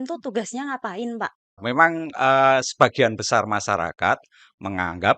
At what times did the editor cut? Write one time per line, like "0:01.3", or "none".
0:01.6